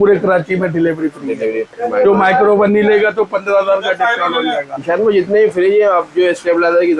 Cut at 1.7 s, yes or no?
yes